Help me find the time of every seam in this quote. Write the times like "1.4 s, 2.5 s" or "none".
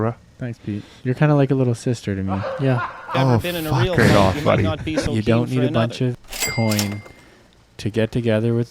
5.1 s, 6.3 s